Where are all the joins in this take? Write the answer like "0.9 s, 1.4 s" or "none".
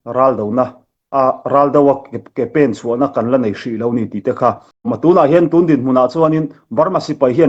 4.9 s